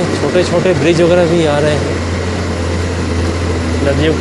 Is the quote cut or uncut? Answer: uncut